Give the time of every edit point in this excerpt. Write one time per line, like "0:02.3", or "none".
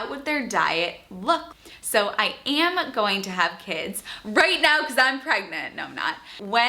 0:01.5

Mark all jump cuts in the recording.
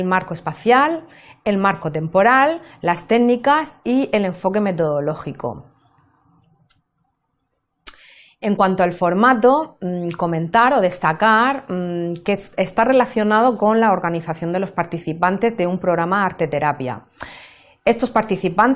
none

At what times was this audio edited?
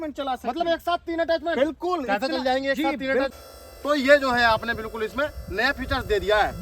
0:03.4

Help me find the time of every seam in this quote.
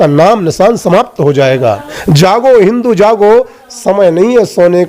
0:02.0

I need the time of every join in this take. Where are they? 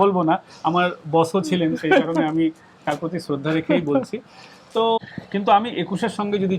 0:05.0

